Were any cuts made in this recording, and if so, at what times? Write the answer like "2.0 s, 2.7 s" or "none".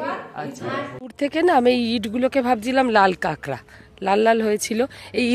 1.0 s